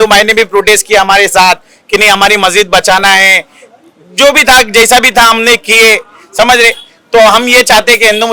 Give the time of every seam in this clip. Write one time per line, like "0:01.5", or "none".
none